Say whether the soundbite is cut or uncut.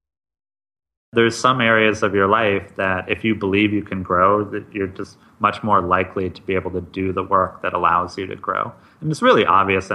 cut